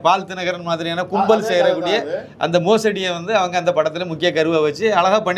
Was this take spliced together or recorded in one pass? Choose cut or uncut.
uncut